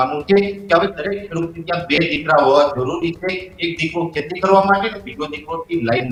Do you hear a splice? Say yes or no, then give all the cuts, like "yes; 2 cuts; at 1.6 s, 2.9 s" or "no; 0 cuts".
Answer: no; 0 cuts